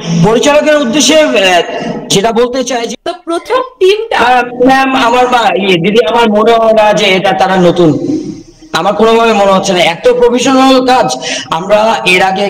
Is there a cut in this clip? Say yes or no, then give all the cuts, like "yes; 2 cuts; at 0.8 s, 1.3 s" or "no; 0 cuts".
yes; 1 cut; at 2.9 s